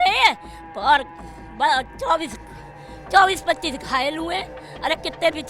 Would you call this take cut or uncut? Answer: uncut